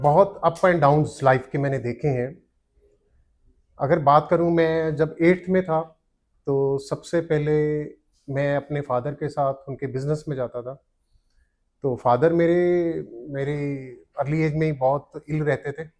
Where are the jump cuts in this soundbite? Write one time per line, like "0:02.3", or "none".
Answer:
none